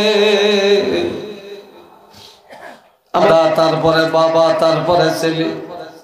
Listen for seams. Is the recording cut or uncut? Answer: cut